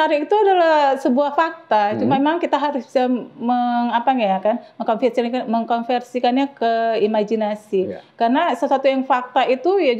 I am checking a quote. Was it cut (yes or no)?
no